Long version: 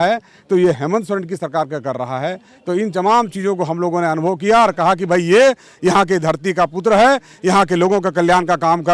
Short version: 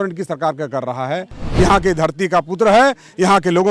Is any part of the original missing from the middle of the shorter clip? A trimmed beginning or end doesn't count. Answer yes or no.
yes